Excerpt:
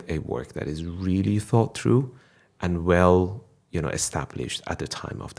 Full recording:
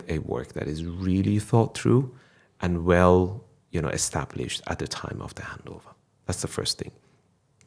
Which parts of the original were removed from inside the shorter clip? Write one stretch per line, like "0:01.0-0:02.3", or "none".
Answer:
none